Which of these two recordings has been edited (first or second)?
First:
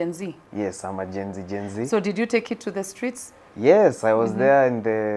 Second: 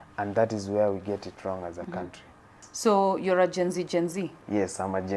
second